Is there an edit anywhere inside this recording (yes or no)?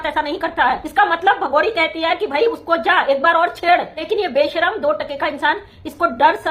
yes